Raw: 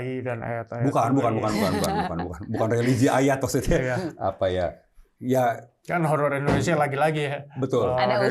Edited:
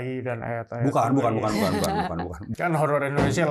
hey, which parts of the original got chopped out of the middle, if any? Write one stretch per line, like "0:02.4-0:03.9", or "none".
0:02.4-0:05.7